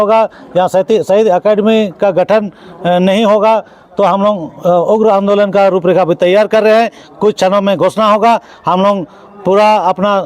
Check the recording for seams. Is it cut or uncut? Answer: uncut